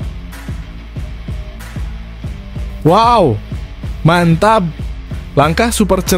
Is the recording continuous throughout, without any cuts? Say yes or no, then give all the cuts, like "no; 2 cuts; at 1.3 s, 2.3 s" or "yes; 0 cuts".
no; 1 cut; at 2.8 s